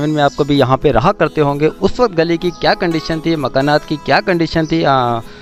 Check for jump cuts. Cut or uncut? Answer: uncut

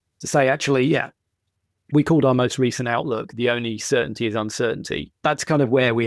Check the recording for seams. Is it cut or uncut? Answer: cut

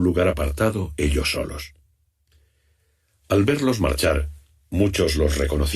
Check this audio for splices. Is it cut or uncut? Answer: cut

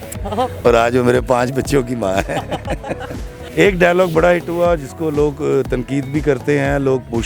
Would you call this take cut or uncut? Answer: uncut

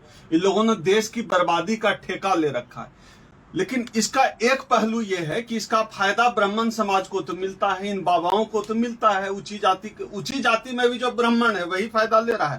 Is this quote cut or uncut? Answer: uncut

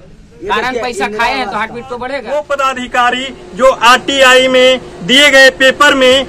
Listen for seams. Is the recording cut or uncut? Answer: cut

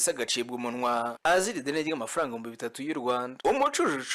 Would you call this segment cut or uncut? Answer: uncut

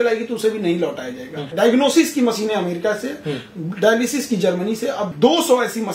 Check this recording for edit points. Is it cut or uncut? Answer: cut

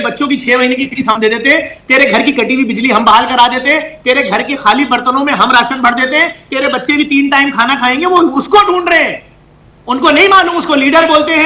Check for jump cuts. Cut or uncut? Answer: uncut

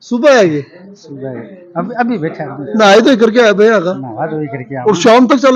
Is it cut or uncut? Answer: uncut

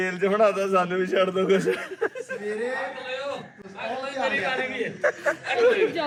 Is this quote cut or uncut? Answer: uncut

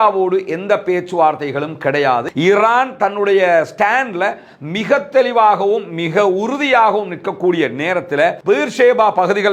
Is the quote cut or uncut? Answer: cut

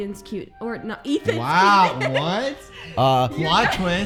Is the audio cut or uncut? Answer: uncut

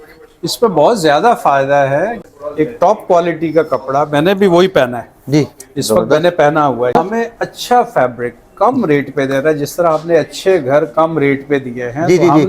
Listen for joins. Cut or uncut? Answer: cut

